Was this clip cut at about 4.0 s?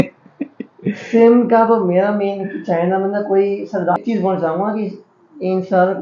yes; 1 cut; at 4.0 s

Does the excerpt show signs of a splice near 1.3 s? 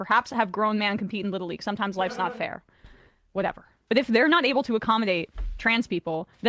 no; 1 cut; at 3.8 s

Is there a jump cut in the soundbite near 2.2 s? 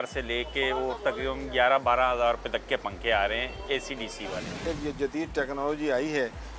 no; 1 cut; at 4.6 s

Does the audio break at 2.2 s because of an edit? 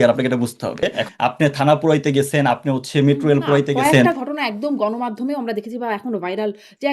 no; 1 cut; at 1.0 s

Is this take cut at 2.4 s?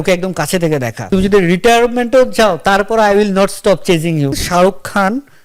no; 2 cuts; at 1.1 s, 4.3 s

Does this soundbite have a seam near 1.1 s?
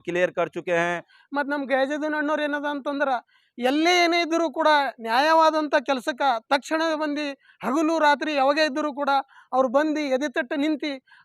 yes; 1 cut; at 1.1 s

